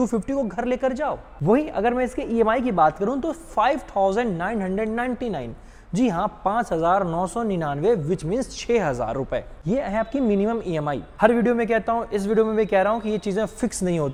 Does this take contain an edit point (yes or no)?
no